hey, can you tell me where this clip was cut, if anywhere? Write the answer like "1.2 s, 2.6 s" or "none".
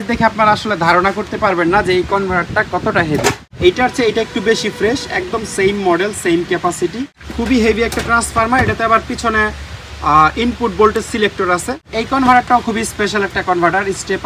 3.5 s, 7.2 s, 11.9 s